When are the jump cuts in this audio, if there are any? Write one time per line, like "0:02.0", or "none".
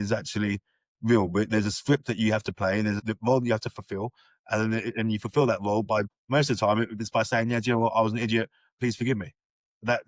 0:03.0
0:06.1
0:08.7